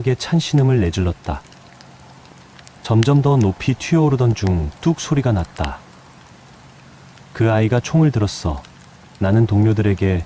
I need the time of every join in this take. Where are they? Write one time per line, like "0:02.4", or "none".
0:01.4
0:02.8
0:06.0
0:07.3